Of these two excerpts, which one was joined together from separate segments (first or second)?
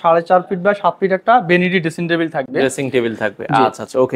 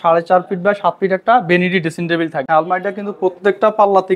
second